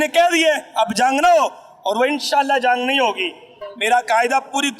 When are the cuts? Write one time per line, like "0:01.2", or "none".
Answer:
0:03.5